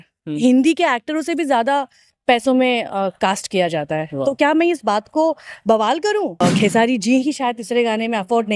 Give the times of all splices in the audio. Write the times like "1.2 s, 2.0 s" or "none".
6.4 s